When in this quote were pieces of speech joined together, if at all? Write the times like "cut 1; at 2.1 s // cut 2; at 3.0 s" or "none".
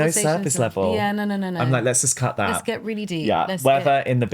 none